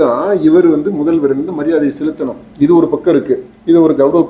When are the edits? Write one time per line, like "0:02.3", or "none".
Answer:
none